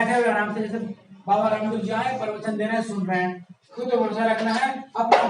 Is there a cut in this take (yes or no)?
yes